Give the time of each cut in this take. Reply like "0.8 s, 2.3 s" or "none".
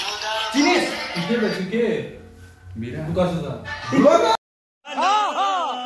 none